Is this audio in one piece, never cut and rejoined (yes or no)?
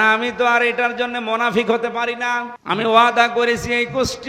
no